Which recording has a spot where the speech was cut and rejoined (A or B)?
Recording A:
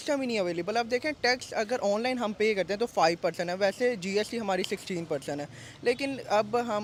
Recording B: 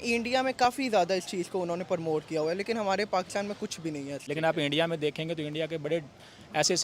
B